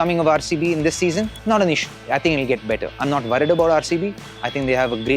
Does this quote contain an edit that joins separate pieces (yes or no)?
yes